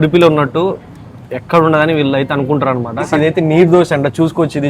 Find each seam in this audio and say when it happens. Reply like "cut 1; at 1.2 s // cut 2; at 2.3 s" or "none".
cut 1; at 3.1 s